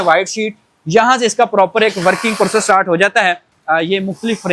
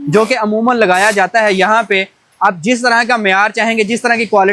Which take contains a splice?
first; 1 cut; at 3.5 s

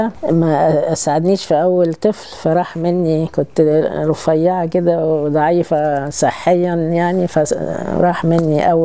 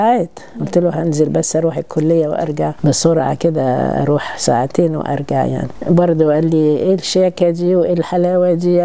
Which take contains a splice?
second; 2 cuts; at 2.8 s, 5.7 s

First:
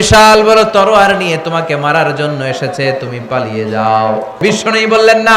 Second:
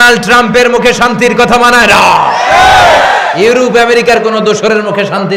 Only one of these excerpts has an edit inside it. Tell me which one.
first; 1 cut; at 4.4 s

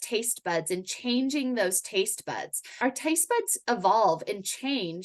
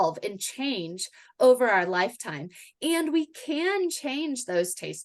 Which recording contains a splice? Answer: first; 1 cut; at 2.8 s

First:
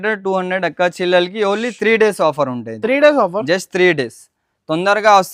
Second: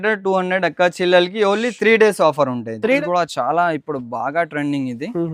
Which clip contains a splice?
second; 1 cut; at 3.0 s

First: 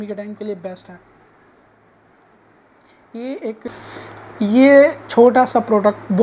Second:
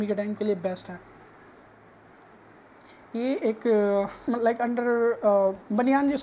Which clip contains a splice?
first; 1 cut; at 3.7 s

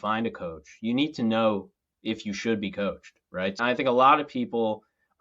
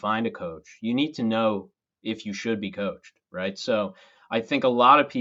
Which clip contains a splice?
first; 1 cut; at 3.6 s

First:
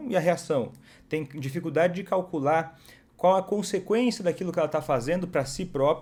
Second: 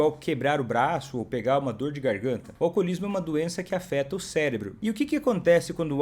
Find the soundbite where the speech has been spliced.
second; 2 cuts; at 2.5 s, 4.7 s

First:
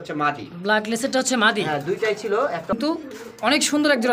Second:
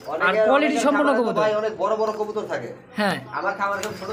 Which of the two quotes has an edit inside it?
first; 1 cut; at 2.7 s

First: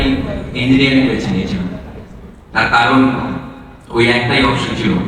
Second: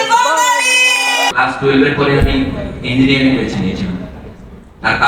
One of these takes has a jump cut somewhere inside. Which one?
second; 1 cut; at 1.3 s

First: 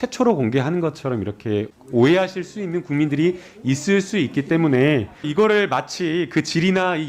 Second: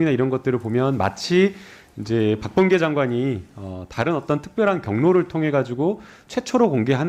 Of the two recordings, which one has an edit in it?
first; 2 cuts; at 1.7 s, 5.3 s

